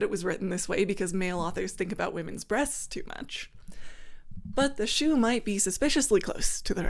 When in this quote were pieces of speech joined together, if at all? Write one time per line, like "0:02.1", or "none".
none